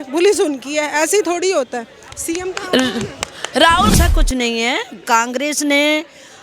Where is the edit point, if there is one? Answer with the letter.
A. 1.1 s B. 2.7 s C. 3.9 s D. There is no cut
C